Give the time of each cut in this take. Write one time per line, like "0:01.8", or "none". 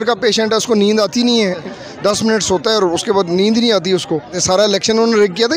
0:01.7
0:04.3